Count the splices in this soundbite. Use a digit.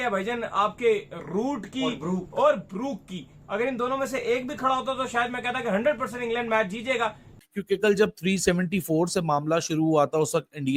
1